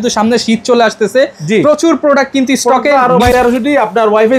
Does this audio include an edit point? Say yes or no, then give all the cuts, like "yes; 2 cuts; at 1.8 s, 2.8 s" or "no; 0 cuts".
yes; 1 cut; at 3.3 s